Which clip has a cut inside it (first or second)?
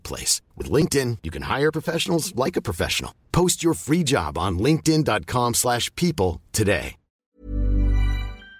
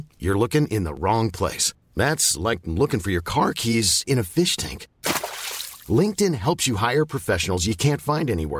first